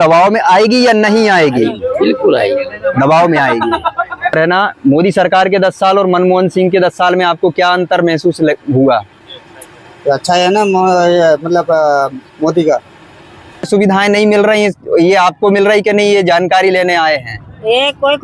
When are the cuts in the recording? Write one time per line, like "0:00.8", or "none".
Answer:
0:04.3
0:13.7